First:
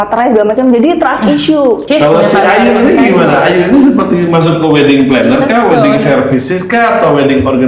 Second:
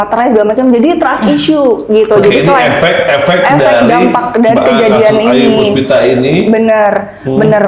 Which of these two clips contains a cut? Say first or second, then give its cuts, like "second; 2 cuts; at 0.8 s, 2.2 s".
first; 1 cut; at 1.8 s